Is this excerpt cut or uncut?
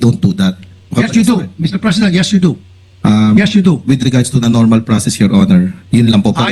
uncut